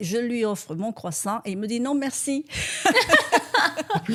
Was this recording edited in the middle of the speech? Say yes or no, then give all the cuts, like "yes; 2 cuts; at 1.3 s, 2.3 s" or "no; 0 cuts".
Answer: no; 0 cuts